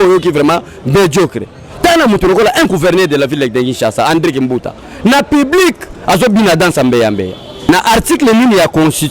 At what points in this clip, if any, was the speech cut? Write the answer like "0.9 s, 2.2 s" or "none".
7.7 s